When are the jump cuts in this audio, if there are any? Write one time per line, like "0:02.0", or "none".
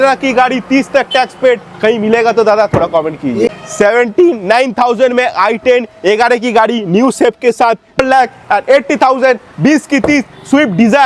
0:03.5
0:08.0

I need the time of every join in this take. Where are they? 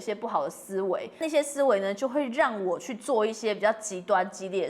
0:01.2

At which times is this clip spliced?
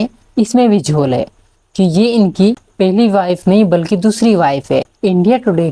none

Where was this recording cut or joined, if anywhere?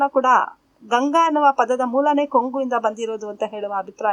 none

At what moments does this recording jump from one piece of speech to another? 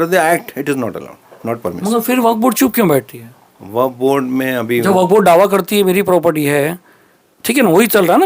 none

